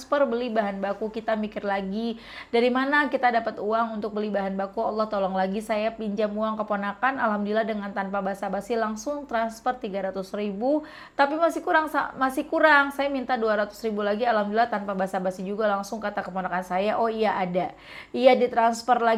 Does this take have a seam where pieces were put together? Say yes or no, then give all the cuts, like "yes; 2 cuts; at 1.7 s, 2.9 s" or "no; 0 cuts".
no; 0 cuts